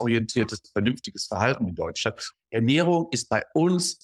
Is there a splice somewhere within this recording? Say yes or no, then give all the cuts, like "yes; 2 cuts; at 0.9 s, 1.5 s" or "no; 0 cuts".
yes; 1 cut; at 2.3 s